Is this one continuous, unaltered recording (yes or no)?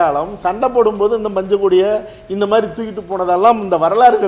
yes